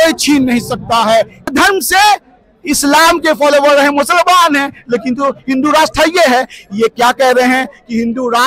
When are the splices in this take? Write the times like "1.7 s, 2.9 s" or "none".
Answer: 1.5 s

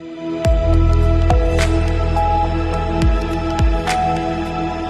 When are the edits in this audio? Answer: none

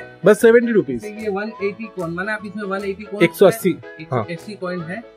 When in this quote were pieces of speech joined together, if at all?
1.1 s

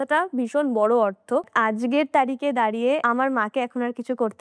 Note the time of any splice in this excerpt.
1.5 s, 3.0 s

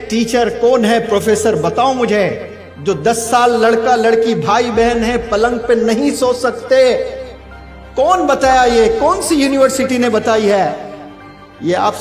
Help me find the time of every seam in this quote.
none

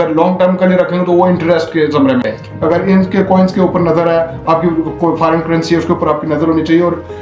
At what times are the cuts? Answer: 2.3 s

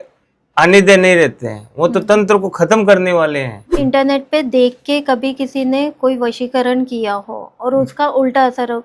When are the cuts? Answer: 3.6 s

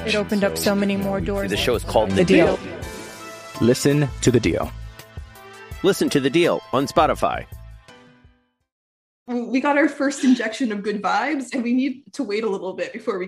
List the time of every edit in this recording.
9.2 s

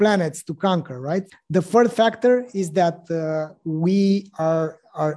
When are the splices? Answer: 1.3 s

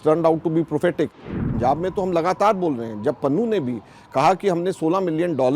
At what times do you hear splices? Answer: 1.1 s

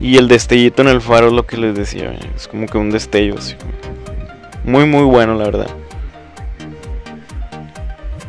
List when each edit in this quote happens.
2.4 s

